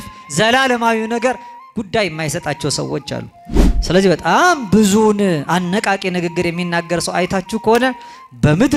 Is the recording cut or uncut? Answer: uncut